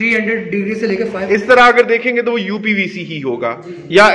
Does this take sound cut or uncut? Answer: cut